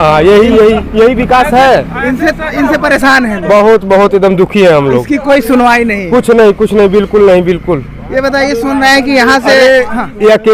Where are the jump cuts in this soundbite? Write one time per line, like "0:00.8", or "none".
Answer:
none